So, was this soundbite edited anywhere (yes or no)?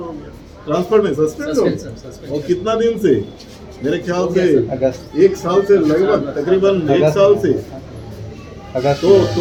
no